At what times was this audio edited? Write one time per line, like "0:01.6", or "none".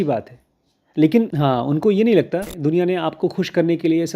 0:01.3
0:02.5